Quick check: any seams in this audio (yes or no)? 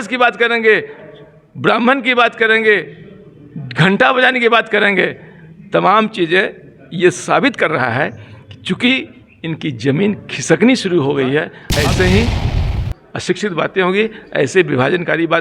yes